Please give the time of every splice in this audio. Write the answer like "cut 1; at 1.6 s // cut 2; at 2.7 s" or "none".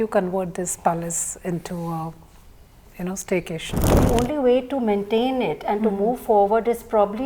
cut 1; at 4.0 s